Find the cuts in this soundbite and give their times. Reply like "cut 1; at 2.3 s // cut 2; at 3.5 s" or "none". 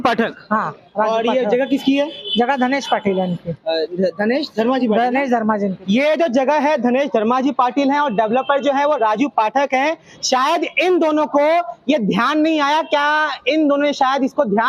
none